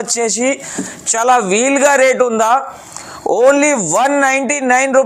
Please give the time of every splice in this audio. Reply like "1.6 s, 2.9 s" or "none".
none